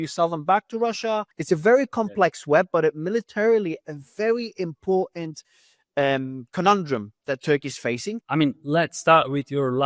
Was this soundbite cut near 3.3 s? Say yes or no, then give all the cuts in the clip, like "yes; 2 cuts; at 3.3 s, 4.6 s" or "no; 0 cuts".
no; 2 cuts; at 1.3 s, 8.2 s